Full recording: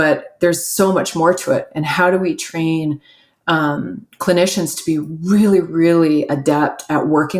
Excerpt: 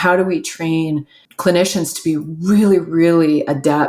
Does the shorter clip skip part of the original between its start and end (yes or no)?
yes